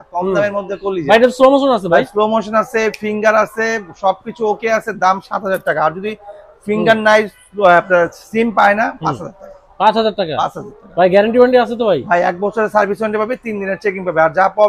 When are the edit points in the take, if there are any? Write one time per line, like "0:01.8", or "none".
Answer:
none